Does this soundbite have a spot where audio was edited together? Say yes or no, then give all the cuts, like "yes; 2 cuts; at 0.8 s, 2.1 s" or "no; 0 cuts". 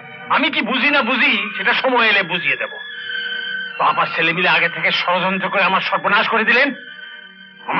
no; 0 cuts